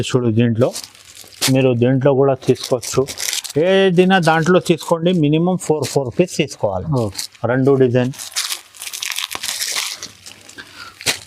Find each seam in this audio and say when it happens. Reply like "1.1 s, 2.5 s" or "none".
none